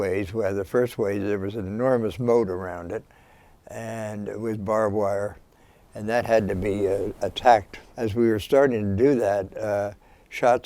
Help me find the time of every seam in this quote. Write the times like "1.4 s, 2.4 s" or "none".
7.8 s